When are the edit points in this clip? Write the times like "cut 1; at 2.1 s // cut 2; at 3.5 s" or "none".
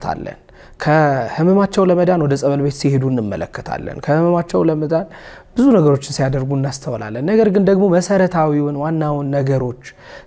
none

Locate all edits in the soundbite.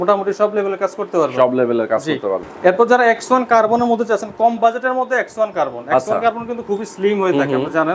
cut 1; at 2.5 s

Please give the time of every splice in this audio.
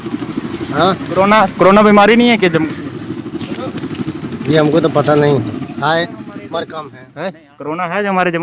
cut 1; at 7.3 s

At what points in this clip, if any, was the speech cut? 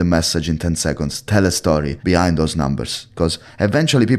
cut 1; at 1.9 s

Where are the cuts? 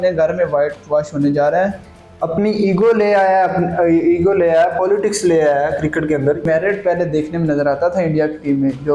cut 1; at 1.8 s // cut 2; at 6.4 s

